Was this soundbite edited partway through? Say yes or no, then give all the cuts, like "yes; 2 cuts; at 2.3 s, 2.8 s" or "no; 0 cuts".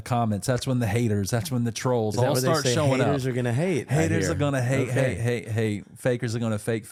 no; 0 cuts